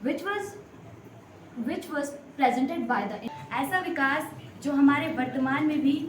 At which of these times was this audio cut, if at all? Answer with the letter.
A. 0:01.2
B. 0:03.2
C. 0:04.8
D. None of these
B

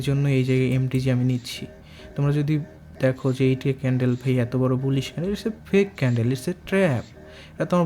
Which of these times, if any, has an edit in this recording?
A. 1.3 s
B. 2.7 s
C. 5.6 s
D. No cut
D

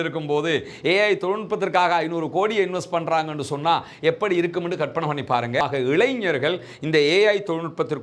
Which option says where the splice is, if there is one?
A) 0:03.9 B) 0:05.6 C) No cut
B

